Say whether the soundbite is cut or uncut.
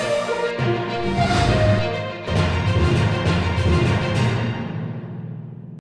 uncut